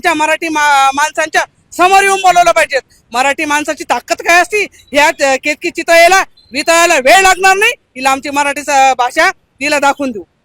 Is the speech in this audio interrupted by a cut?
no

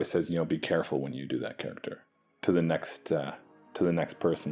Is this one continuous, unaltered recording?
yes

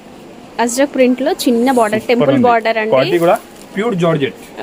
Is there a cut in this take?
no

